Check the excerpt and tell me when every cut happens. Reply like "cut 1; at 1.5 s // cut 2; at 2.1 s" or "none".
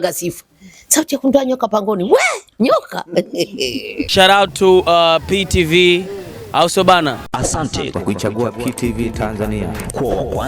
cut 1; at 4.0 s